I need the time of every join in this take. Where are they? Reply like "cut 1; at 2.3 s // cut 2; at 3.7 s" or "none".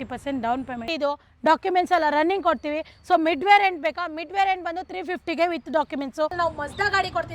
cut 1; at 0.9 s // cut 2; at 6.3 s